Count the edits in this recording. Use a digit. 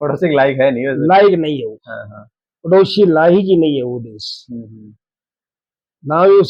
0